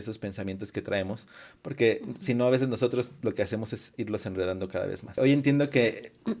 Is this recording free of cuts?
no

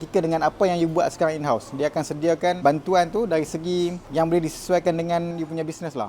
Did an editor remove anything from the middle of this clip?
yes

